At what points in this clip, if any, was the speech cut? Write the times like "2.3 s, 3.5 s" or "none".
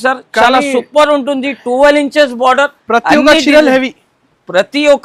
none